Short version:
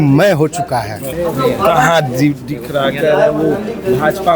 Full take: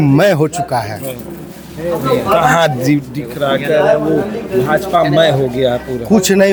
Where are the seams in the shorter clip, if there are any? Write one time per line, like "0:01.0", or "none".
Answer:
0:01.0